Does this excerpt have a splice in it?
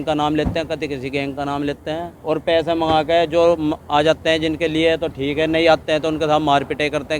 yes; 1 cut; at 2.1 s

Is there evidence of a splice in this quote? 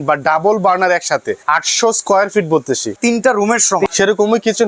yes; 3 cuts; at 1.4 s, 2.9 s, 3.9 s

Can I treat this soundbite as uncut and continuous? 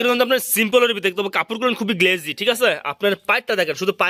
yes; 0 cuts

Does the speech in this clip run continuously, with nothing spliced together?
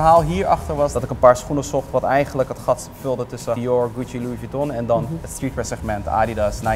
no; 3 cuts; at 1.0 s, 3.6 s, 5.2 s

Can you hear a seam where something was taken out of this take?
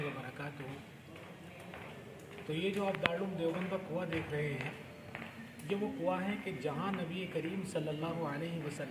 no; 0 cuts

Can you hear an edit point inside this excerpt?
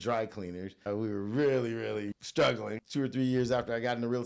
yes; 3 cuts; at 0.8 s, 2.1 s, 2.8 s

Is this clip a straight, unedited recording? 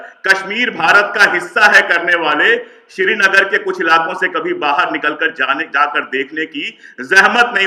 yes; 0 cuts

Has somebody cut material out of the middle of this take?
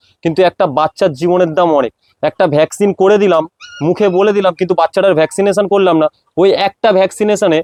no; 0 cuts

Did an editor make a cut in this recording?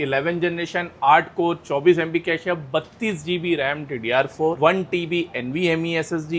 no; 0 cuts

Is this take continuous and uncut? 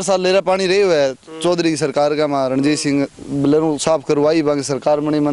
yes; 0 cuts

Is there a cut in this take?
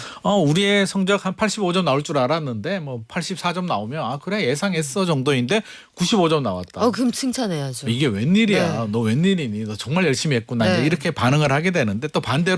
no; 0 cuts

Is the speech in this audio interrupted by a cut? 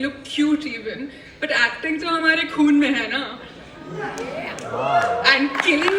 no; 0 cuts

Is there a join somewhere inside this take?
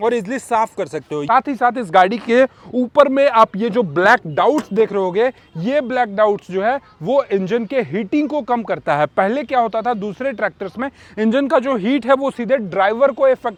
no; 0 cuts

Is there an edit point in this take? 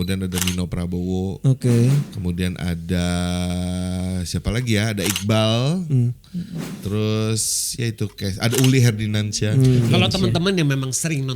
no; 0 cuts

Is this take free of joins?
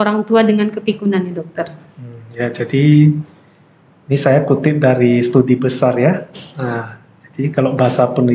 yes; 0 cuts

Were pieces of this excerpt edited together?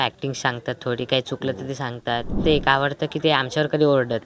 yes; 1 cut; at 2.4 s

